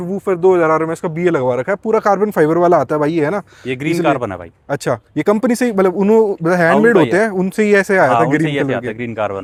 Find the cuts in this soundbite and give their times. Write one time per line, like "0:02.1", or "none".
none